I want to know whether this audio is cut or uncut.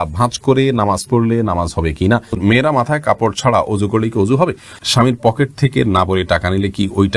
cut